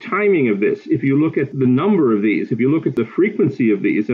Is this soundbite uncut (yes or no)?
no